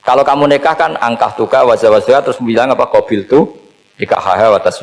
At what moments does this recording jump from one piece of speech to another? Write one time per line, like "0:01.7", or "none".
none

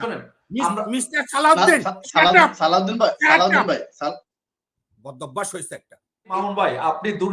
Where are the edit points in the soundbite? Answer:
0:06.3

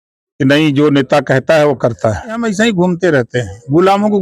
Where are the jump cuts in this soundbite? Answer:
0:02.4

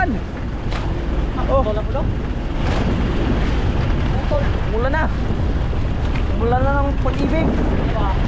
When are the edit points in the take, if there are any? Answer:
none

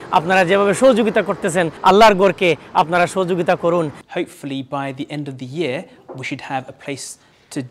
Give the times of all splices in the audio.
0:01.7
0:04.0

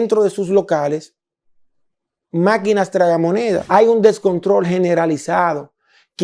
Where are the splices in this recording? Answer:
0:03.6

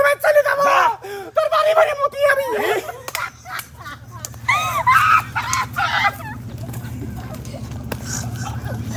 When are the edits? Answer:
none

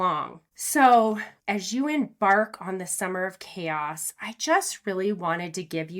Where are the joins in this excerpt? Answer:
0:01.3

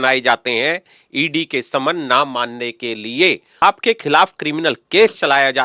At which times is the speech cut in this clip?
0:03.6

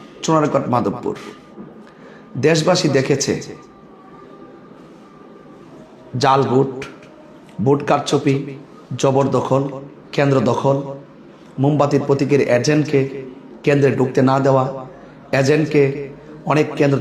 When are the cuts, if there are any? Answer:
none

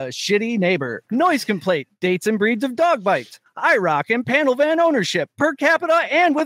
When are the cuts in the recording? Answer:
0:01.0
0:01.9

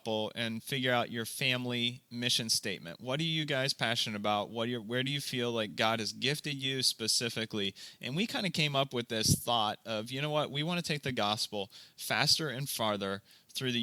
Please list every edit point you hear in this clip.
none

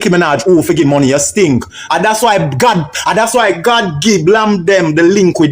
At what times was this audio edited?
0:01.6

